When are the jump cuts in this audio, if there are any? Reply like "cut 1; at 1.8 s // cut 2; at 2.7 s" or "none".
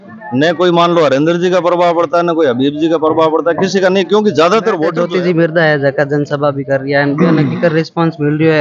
cut 1; at 5.0 s